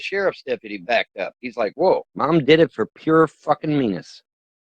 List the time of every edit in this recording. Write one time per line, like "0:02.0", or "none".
0:02.1